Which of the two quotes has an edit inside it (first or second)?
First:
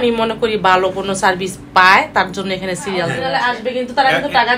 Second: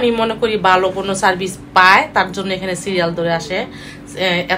first